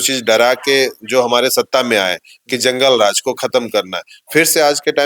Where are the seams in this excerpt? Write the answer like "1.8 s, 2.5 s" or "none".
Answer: none